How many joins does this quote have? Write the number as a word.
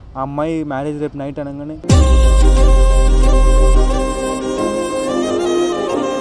one